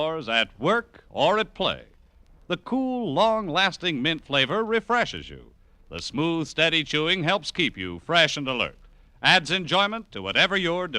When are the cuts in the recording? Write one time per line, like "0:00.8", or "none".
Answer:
0:06.2